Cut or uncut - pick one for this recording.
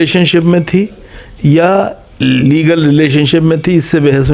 uncut